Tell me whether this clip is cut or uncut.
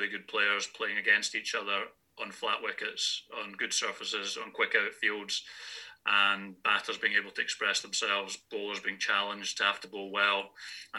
uncut